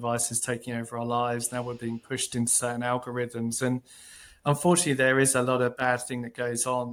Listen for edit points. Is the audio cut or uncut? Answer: uncut